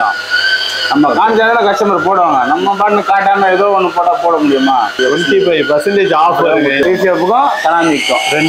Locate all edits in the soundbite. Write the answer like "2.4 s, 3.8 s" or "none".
4.9 s, 6.8 s